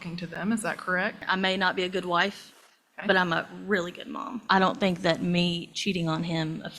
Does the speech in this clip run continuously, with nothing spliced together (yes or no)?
no